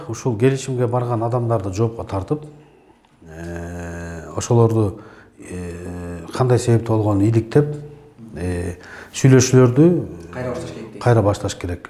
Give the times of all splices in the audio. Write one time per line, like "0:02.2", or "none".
none